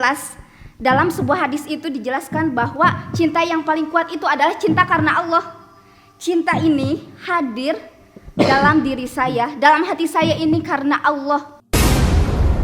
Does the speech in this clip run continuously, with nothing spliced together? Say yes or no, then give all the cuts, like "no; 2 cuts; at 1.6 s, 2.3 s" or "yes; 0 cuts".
no; 1 cut; at 11.6 s